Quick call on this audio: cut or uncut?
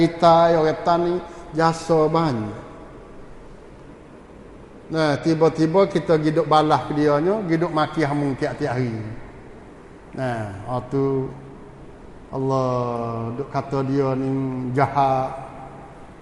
uncut